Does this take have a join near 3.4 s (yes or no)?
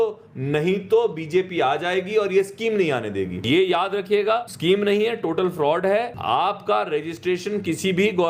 yes